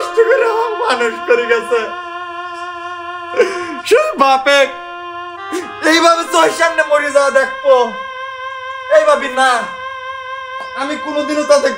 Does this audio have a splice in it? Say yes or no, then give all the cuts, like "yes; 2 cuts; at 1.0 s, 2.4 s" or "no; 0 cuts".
no; 0 cuts